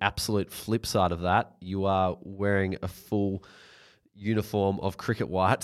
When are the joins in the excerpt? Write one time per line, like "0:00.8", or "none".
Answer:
none